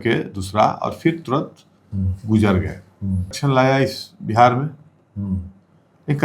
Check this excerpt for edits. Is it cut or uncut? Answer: cut